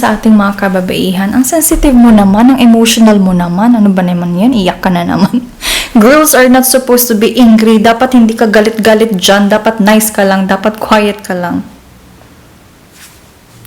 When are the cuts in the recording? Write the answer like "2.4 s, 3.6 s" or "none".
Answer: none

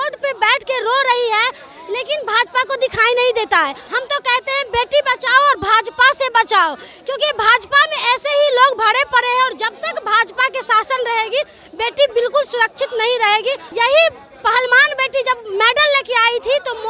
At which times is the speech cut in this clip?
3.8 s, 13.6 s

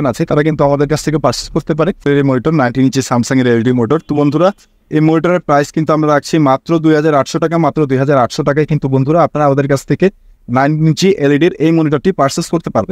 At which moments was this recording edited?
2.1 s

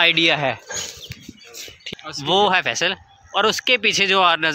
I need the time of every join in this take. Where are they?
1.8 s

